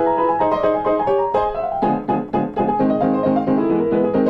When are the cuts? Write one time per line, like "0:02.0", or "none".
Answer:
none

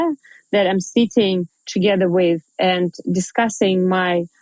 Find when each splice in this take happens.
none

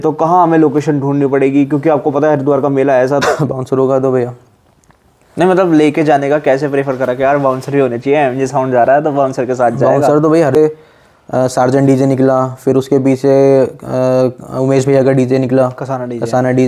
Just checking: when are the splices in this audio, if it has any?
0:03.2
0:10.5

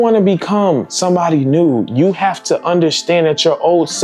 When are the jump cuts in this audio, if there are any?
none

